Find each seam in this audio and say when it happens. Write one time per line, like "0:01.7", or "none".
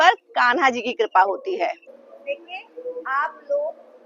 0:01.9

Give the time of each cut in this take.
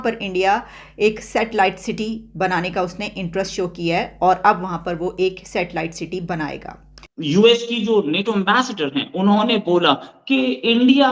0:07.1

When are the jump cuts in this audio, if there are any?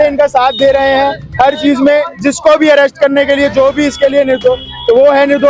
none

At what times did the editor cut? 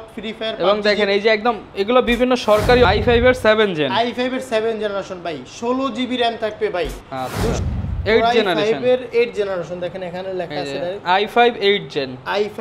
0:02.8
0:07.6

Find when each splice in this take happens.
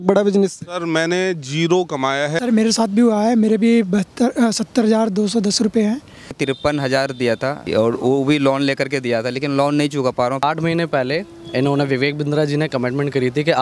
0:02.3
0:06.4
0:07.7
0:10.4

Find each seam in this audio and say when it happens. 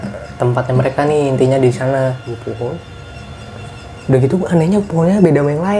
0:02.3

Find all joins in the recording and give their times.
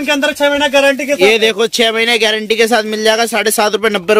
none

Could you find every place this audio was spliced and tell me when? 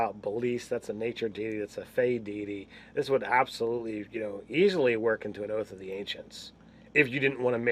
0:01.5

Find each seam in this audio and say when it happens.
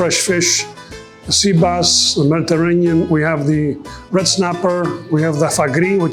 none

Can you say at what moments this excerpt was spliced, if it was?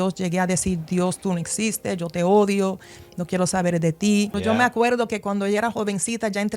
0:04.3

